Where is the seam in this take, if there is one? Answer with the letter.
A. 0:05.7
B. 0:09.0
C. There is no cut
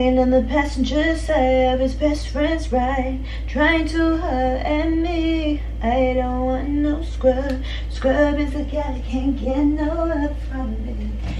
C